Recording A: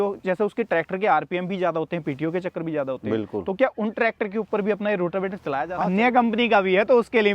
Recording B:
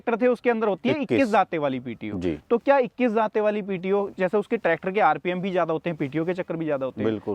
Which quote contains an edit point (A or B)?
A